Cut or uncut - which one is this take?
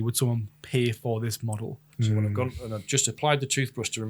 cut